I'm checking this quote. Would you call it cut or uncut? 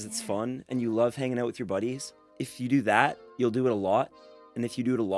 cut